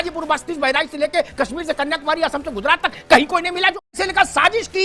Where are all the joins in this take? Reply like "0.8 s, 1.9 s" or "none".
3.9 s